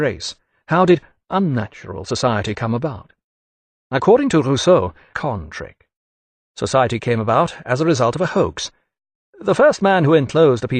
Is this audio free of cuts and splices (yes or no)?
yes